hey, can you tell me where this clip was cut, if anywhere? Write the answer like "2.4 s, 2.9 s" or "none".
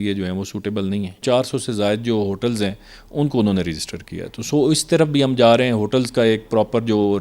1.2 s